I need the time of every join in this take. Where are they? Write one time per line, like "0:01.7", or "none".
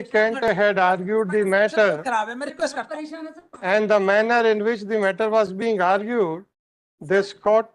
none

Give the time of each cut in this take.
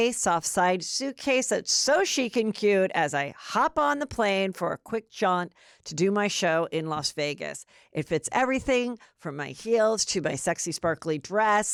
none

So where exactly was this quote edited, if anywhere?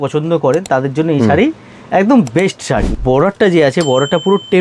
0:02.9

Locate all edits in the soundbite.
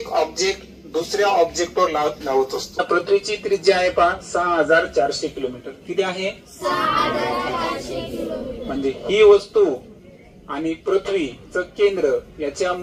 0:02.8

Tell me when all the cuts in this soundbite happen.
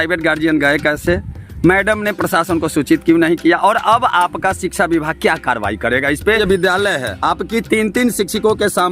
0:06.3

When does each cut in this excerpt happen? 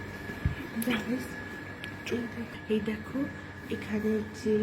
0:02.5

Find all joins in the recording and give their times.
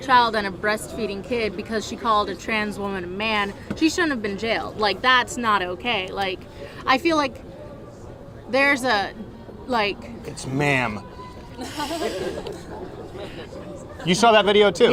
none

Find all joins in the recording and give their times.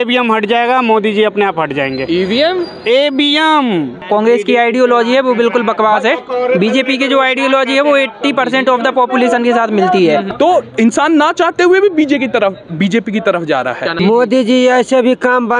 0:04.0
0:10.3
0:13.9

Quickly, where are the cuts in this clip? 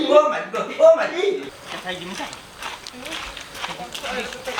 none

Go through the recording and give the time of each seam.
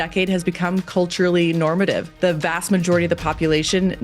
0:02.1

